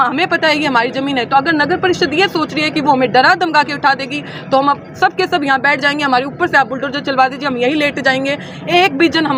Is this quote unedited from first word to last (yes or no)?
yes